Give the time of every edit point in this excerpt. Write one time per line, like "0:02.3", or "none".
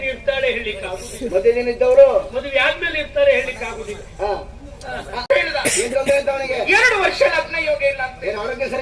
0:05.2